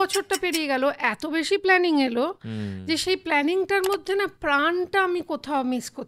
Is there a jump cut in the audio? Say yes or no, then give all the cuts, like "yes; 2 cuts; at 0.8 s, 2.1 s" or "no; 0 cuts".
no; 0 cuts